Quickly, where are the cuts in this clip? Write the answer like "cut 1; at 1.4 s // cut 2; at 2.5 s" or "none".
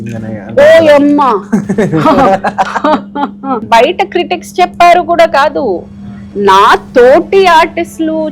cut 1; at 3.6 s